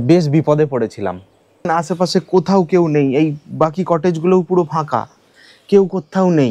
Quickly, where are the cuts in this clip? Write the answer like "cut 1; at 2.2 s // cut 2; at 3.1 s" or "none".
cut 1; at 1.7 s